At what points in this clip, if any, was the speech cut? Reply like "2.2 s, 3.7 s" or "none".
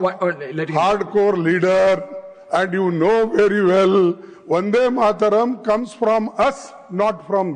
none